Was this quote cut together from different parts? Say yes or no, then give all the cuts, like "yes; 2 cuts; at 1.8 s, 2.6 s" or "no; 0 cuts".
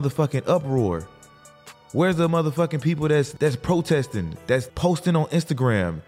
yes; 2 cuts; at 3.3 s, 4.7 s